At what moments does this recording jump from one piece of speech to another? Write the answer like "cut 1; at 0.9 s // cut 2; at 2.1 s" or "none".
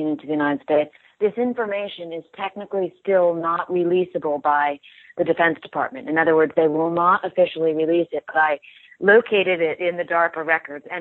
cut 1; at 1.0 s